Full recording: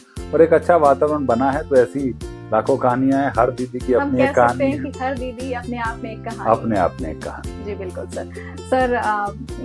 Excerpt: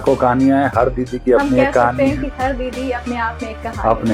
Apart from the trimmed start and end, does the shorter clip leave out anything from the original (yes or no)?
no